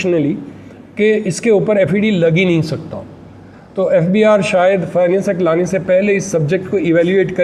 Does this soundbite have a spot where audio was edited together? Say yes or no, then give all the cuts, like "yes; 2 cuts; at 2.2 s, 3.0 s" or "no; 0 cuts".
no; 0 cuts